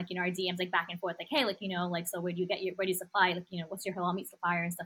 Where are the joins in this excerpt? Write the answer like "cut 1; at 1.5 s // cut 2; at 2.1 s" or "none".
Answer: none